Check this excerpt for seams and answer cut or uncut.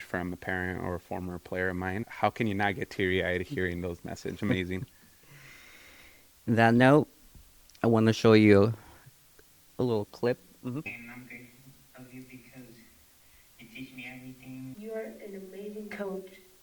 cut